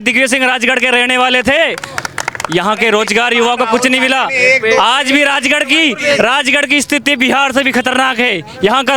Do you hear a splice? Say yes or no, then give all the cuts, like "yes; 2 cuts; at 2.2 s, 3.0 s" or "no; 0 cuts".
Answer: no; 0 cuts